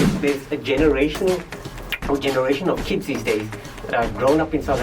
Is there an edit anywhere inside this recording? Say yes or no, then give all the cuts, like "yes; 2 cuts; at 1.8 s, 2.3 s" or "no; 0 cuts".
no; 0 cuts